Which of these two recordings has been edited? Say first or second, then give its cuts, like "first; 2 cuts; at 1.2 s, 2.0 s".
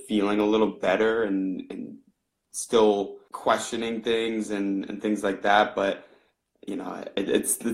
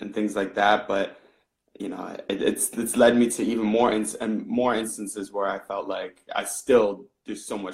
first; 1 cut; at 3.2 s